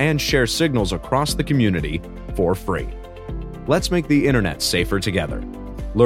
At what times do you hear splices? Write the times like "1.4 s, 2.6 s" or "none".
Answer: none